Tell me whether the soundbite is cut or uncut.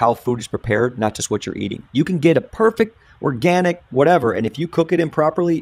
uncut